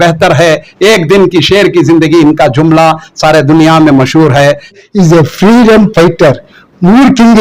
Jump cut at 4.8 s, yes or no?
yes